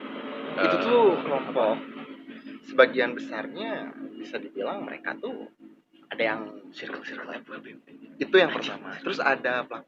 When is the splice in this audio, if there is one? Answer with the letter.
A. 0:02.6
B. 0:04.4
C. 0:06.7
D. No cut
C